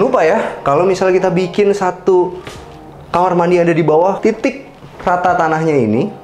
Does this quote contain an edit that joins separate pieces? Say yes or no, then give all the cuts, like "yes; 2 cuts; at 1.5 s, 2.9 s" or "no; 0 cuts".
yes; 1 cut; at 4.2 s